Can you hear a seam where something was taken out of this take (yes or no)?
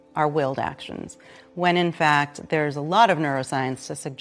yes